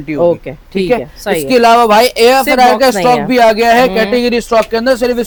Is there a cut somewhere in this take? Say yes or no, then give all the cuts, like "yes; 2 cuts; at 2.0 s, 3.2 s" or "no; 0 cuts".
no; 0 cuts